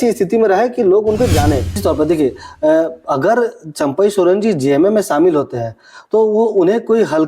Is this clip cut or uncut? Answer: cut